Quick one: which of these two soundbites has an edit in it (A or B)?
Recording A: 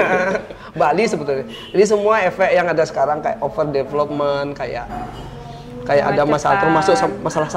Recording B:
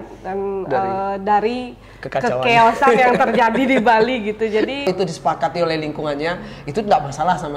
B